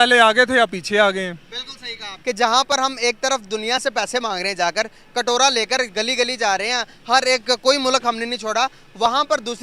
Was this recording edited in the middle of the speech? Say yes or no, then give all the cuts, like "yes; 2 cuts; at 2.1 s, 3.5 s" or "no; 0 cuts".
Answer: no; 0 cuts